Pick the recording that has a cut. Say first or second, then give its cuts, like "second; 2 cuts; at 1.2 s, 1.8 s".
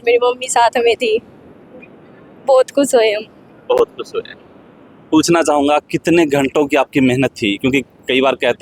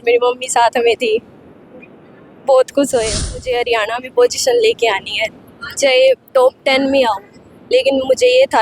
second; 1 cut; at 3.5 s